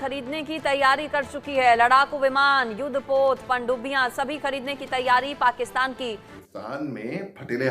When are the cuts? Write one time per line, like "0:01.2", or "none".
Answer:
0:06.3